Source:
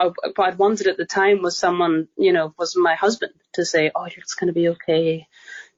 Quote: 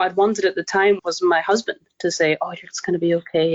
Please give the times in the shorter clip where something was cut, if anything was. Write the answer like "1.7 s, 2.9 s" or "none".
1.0 s